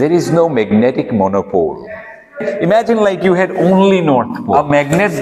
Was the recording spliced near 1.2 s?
no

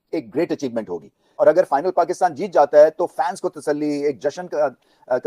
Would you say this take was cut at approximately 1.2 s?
yes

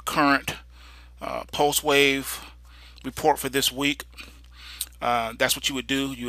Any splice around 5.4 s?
yes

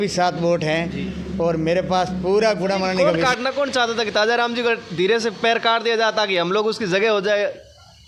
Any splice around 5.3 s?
no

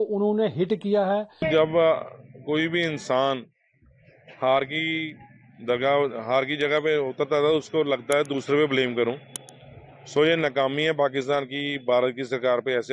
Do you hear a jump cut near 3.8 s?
no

